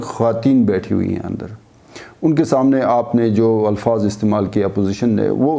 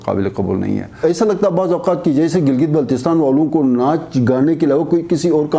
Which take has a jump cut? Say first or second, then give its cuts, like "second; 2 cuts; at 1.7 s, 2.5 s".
second; 1 cut; at 1.0 s